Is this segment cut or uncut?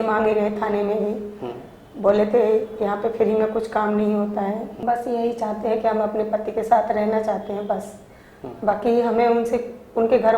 cut